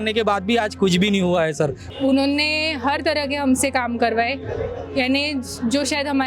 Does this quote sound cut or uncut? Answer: cut